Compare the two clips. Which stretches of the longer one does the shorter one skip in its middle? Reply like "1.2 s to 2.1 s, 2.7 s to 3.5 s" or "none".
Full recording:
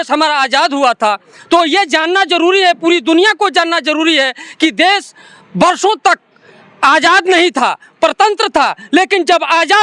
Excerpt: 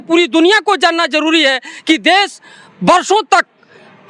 none